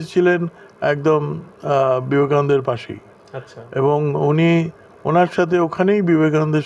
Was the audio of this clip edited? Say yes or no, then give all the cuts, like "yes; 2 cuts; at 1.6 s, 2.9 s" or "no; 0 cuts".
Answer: no; 0 cuts